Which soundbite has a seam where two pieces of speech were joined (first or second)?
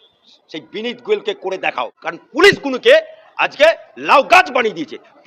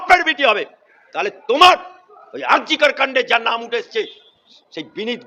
first